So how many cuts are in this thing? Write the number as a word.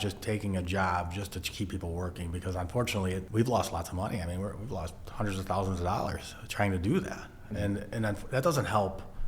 one